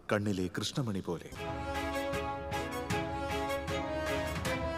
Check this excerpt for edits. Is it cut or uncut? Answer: cut